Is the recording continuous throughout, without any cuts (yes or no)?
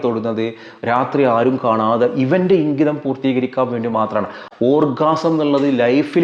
no